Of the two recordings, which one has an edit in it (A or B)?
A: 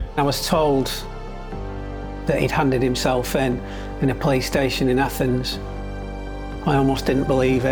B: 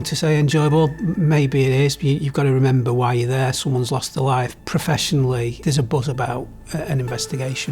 B